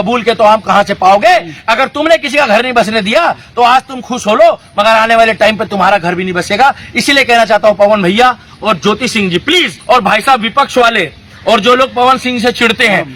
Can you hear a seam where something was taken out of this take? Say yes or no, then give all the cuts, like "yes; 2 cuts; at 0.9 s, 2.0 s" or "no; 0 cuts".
yes; 1 cut; at 9.8 s